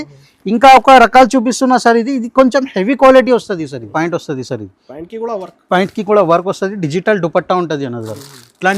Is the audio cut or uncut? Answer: cut